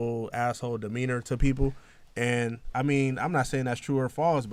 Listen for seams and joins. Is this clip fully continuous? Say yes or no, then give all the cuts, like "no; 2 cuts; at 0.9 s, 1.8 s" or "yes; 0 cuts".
yes; 0 cuts